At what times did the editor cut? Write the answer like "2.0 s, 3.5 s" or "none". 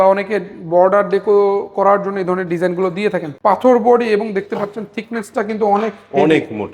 3.3 s

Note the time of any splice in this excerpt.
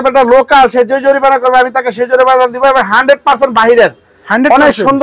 none

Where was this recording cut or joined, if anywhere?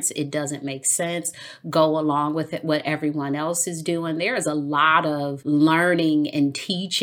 5.4 s

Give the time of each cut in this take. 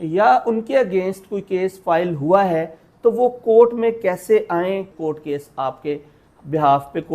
4.9 s

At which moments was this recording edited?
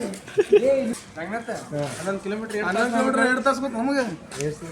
1.0 s

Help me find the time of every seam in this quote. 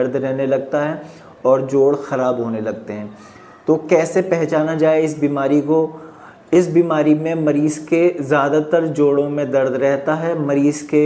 none

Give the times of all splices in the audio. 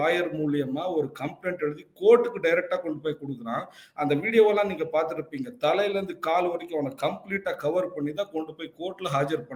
none

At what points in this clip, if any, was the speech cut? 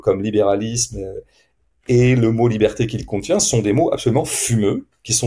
none

